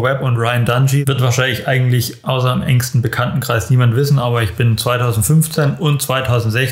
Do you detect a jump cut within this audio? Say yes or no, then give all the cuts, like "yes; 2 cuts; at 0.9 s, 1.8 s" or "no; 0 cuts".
yes; 1 cut; at 1.0 s